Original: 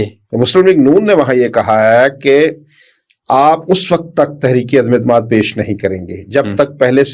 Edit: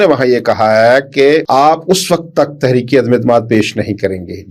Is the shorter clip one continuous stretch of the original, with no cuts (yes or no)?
no